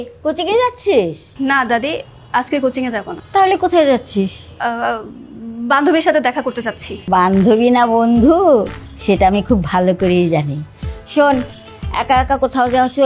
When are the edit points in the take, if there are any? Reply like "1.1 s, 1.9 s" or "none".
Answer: 1.2 s, 3.2 s, 4.4 s, 6.9 s